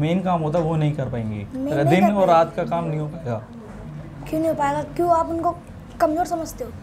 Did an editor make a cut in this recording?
no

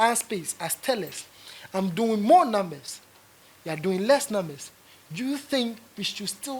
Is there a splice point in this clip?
no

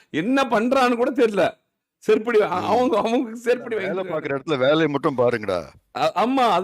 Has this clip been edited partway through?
yes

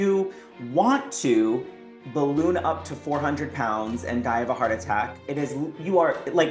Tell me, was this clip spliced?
no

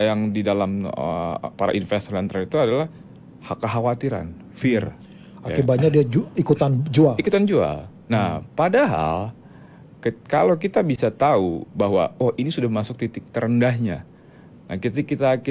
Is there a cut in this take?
no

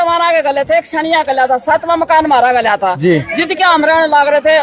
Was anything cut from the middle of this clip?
no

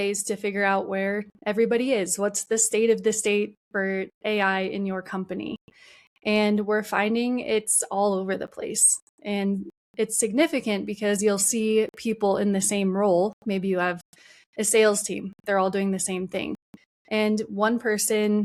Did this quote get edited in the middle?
no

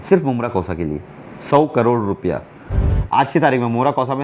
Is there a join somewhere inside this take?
yes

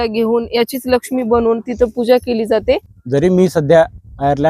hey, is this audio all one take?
no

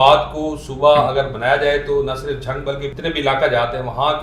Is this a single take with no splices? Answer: no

